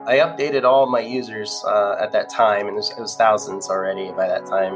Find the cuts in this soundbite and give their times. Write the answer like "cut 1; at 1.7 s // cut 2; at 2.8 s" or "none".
none